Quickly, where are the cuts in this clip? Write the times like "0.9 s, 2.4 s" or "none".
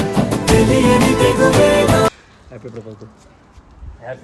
2.2 s

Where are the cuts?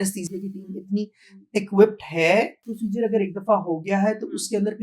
2.6 s

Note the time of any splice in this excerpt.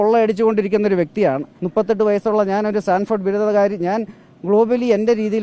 1.5 s

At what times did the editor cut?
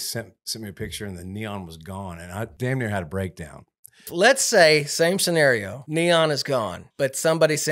2.5 s, 4.1 s, 5.8 s, 6.8 s

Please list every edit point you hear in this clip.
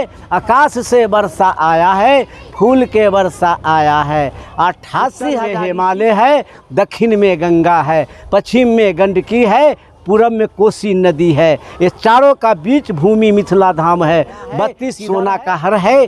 5.4 s, 14.9 s

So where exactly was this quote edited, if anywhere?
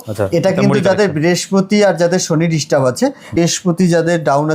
3.4 s

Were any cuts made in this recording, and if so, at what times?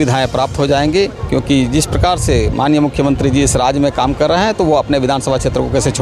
none

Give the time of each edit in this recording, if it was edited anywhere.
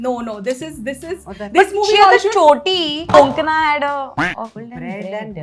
3.1 s, 4.6 s

